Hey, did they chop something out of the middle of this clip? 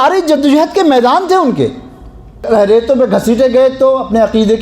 yes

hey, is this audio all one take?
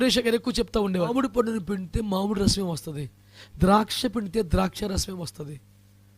no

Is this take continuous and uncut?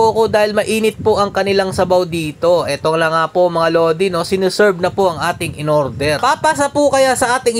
no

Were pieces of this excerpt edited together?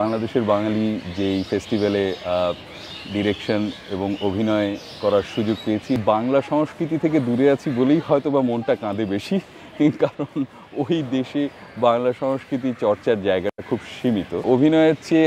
yes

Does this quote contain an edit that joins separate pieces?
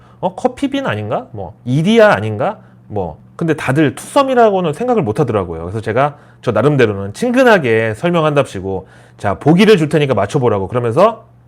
yes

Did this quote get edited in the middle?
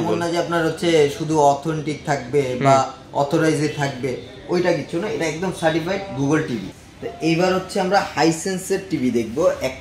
yes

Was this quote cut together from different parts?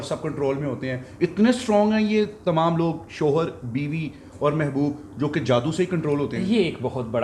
no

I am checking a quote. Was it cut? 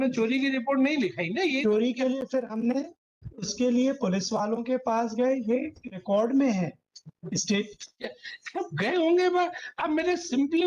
no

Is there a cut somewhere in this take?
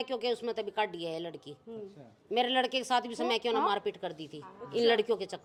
no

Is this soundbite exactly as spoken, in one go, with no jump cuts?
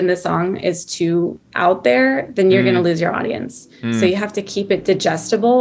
yes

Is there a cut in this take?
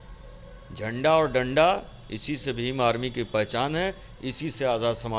no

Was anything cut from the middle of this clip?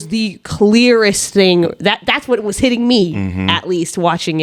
no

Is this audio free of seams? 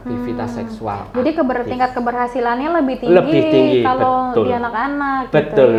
yes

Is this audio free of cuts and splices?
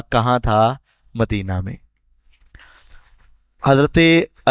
yes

